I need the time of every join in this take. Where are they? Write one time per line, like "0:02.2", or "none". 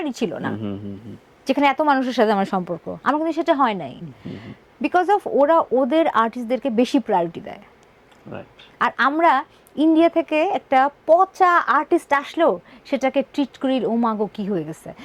none